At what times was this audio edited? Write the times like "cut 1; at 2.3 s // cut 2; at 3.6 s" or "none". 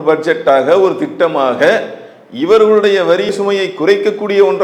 none

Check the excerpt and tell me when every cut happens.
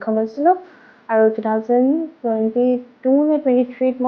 none

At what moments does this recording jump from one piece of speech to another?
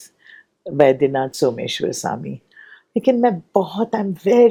none

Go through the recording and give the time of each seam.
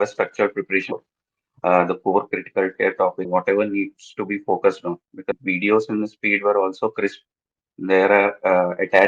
cut 1; at 0.9 s // cut 2; at 3.3 s // cut 3; at 5.4 s

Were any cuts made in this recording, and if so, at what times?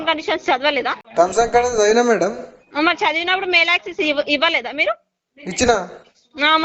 cut 1; at 1.0 s

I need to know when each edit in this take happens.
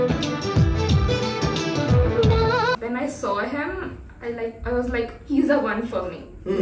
cut 1; at 2.7 s

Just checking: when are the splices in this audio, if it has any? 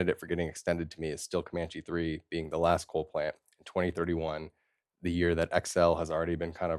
none

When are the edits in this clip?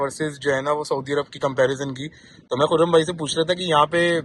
none

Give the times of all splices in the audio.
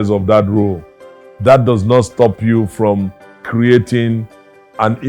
none

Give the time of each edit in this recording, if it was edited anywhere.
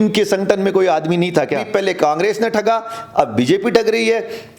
cut 1; at 1.7 s

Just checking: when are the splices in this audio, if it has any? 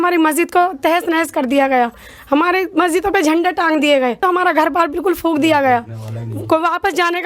cut 1; at 4.2 s

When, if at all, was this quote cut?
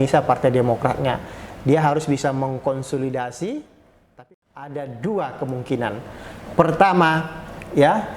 cut 1; at 4.2 s

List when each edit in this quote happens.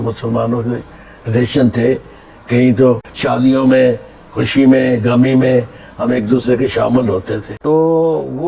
cut 1; at 3.1 s // cut 2; at 7.4 s

